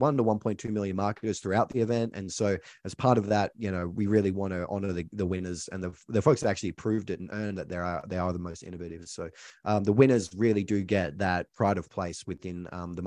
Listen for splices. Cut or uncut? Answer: cut